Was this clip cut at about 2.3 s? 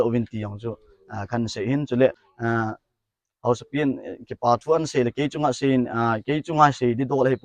yes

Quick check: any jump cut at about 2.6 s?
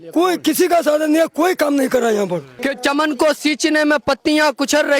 yes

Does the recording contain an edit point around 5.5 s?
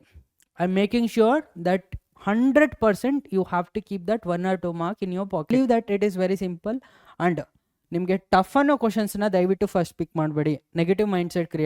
yes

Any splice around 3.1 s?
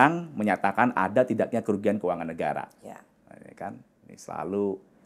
no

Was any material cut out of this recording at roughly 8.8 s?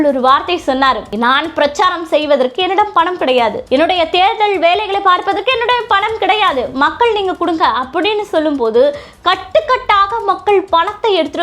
no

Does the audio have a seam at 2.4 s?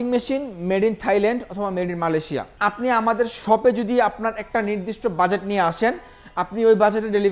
yes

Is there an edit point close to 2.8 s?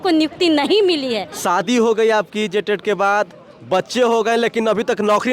no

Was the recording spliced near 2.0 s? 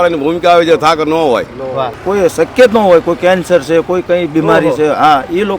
yes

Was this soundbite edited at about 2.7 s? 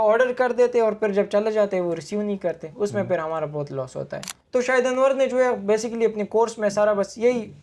no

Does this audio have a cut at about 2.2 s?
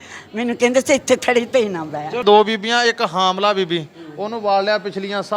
yes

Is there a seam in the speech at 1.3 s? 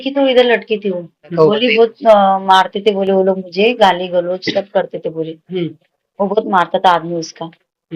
yes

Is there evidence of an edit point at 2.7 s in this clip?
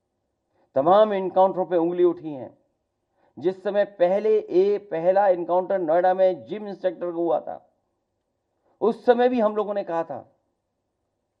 no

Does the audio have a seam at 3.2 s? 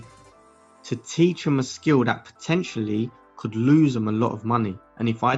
no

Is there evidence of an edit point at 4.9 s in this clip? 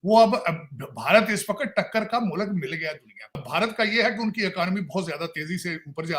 no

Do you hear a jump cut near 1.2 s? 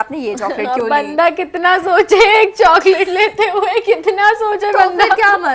no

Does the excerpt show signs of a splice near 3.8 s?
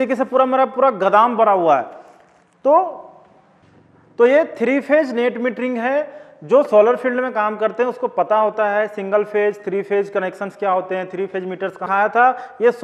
yes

